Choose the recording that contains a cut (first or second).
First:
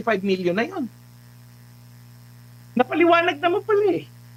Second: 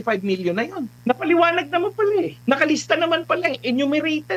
second